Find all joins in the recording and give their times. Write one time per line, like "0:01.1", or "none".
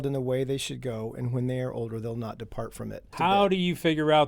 0:03.0